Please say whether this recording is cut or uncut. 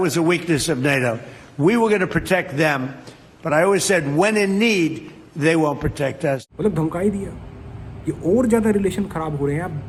uncut